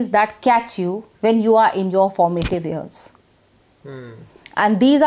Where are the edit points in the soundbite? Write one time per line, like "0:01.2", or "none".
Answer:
none